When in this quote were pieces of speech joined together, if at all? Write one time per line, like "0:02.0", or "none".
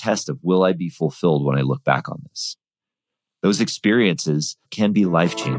0:04.7

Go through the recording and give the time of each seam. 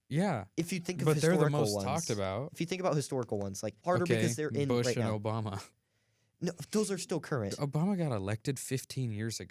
0:03.8
0:07.6

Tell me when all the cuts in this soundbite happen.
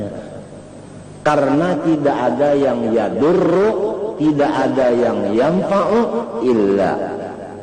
none

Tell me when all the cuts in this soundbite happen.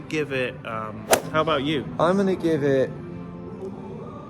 0:01.3

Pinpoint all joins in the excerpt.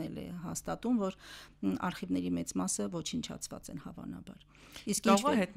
none

